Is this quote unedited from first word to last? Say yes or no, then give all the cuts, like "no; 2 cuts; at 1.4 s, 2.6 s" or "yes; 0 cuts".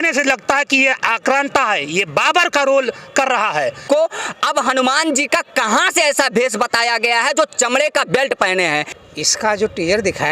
no; 2 cuts; at 3.9 s, 9.0 s